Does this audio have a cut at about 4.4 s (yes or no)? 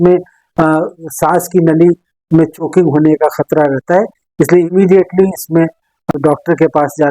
no